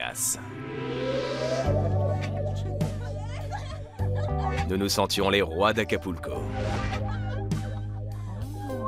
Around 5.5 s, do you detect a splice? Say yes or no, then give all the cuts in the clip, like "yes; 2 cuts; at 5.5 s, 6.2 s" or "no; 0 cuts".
yes; 1 cut; at 5.5 s